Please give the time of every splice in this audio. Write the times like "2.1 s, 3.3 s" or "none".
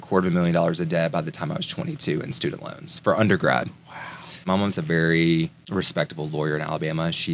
4.5 s, 5.6 s